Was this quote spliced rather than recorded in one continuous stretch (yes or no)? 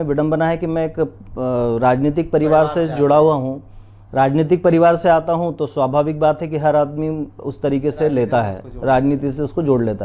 no